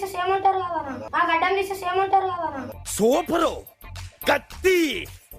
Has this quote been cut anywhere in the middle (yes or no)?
no